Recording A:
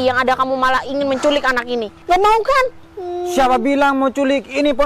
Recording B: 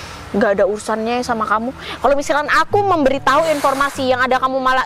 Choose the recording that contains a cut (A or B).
A